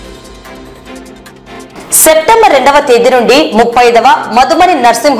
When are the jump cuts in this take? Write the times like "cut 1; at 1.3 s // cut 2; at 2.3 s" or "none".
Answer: cut 1; at 1.8 s